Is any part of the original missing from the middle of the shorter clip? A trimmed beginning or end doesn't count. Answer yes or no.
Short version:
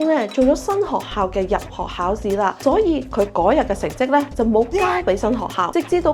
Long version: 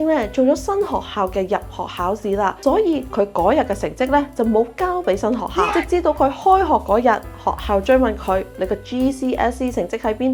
no